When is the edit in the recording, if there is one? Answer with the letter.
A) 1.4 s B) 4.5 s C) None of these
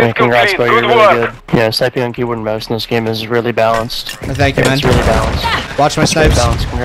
A